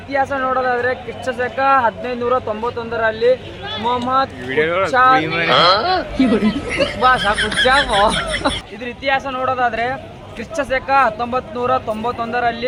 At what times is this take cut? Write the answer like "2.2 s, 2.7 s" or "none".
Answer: none